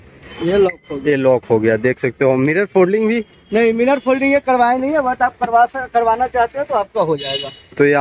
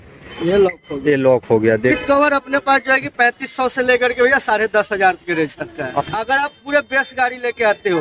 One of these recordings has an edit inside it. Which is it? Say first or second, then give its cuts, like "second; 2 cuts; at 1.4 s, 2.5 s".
second; 2 cuts; at 2.0 s, 6.0 s